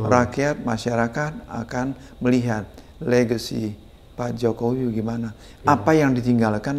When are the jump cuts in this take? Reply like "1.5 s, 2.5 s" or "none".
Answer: none